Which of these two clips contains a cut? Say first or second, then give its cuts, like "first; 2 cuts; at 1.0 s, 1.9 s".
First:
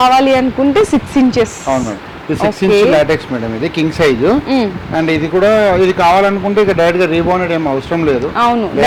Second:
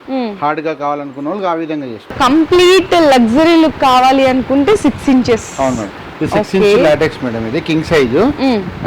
second; 1 cut; at 2.2 s